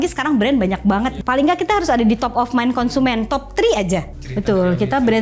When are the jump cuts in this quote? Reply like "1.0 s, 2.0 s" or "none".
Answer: 1.2 s, 4.1 s